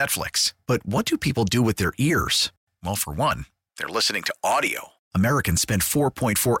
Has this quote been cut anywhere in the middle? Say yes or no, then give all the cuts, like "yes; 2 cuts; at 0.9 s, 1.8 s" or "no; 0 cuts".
no; 0 cuts